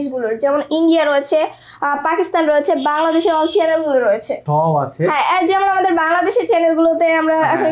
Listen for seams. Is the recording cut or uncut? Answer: cut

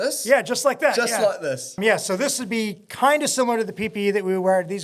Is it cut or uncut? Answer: cut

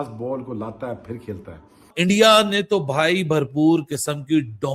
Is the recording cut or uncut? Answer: cut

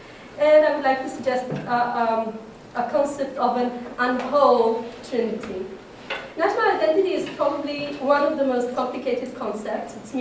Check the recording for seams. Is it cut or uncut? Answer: uncut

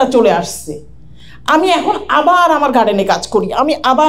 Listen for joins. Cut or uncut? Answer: uncut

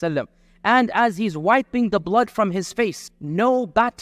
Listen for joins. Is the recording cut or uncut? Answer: uncut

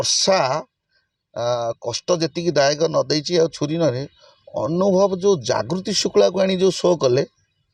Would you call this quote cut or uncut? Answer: uncut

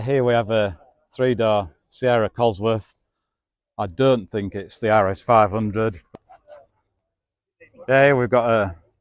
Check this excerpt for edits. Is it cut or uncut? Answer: cut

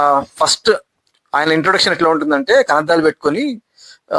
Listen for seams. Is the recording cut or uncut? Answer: uncut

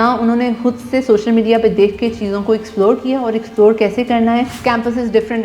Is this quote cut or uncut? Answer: cut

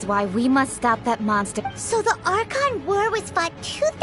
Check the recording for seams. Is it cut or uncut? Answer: cut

